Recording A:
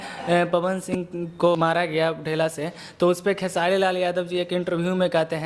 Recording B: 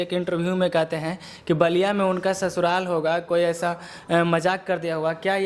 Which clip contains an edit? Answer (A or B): A